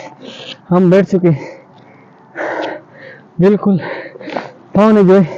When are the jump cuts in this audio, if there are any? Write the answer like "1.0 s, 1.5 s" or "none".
none